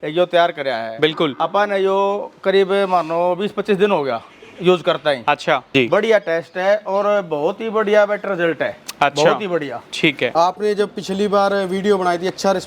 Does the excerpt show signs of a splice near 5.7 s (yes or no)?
yes